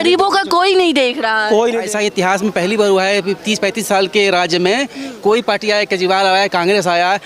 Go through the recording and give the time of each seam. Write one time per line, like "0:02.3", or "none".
0:01.8